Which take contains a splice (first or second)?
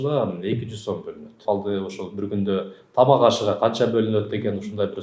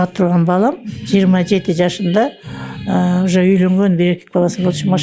first